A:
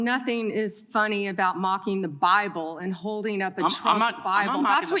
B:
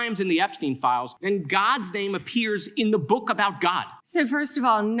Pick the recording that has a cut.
B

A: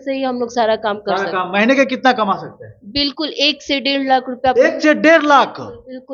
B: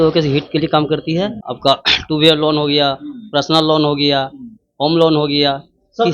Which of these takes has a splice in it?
B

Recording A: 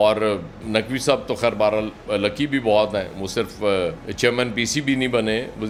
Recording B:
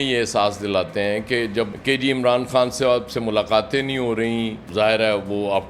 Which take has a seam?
B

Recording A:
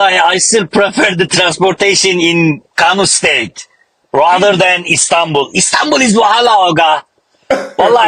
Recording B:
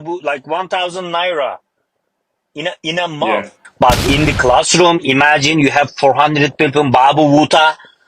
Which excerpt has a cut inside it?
B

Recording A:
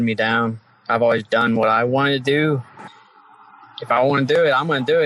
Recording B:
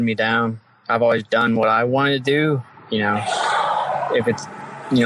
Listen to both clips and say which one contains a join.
A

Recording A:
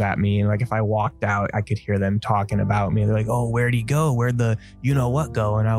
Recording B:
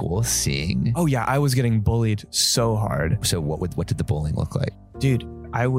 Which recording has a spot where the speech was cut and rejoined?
B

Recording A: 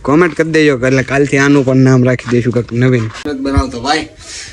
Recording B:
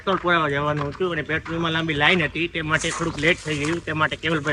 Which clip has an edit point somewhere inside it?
A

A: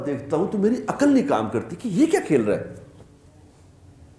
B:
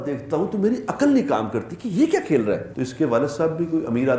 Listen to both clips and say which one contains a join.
B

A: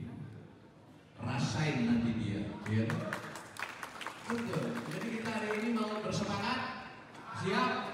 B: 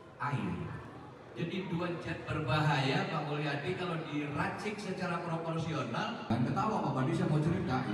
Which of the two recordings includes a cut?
B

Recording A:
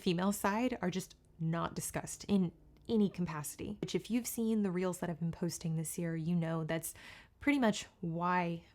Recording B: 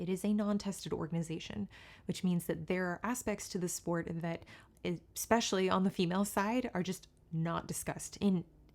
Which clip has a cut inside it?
A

